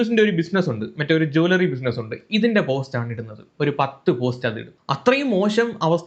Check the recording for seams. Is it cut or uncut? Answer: cut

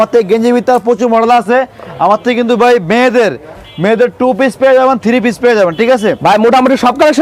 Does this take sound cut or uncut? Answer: uncut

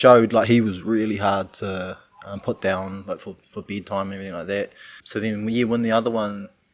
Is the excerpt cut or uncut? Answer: cut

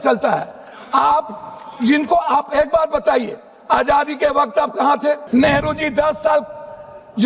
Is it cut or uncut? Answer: cut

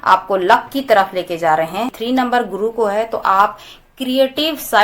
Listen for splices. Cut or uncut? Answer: cut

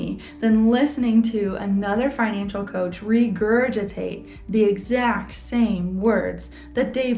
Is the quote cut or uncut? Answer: uncut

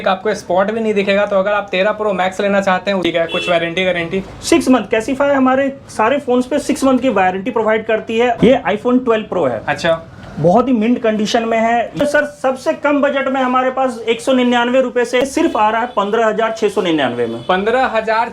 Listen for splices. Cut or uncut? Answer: cut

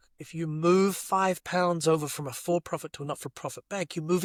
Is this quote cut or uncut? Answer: uncut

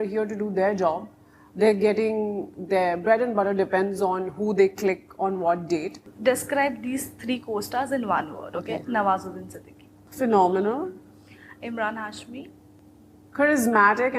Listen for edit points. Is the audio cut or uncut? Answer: cut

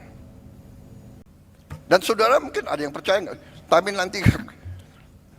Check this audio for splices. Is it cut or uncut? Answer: cut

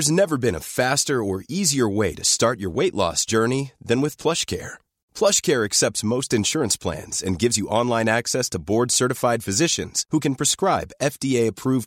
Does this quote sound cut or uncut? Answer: uncut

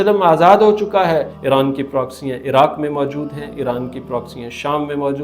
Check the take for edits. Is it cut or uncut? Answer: cut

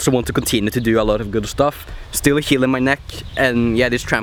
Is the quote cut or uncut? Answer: uncut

